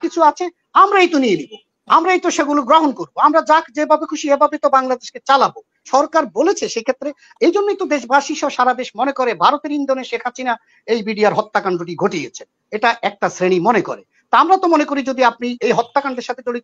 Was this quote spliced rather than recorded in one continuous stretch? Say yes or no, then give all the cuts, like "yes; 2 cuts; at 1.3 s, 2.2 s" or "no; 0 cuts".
yes; 1 cut; at 5.9 s